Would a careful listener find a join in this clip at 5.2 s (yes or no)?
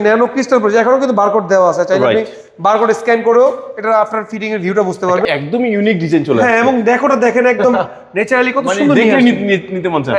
yes